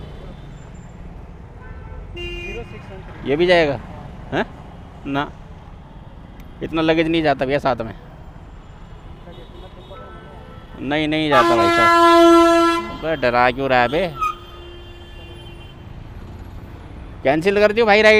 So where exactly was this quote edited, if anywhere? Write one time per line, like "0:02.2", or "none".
none